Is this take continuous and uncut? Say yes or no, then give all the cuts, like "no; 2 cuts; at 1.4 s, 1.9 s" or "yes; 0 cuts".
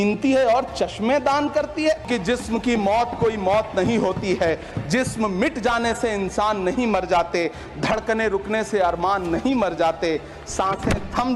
no; 1 cut; at 2.1 s